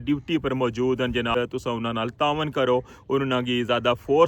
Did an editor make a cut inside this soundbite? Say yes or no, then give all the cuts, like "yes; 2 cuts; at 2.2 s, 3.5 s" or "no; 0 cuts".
yes; 1 cut; at 1.3 s